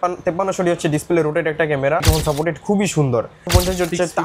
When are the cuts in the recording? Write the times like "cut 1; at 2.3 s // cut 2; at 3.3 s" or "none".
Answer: cut 1; at 2.1 s // cut 2; at 3.5 s